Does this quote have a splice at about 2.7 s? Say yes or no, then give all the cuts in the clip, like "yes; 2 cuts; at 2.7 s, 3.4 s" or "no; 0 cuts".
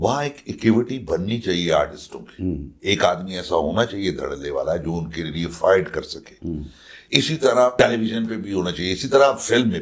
yes; 1 cut; at 2.7 s